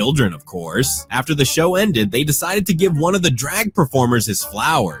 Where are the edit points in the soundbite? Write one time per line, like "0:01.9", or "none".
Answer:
none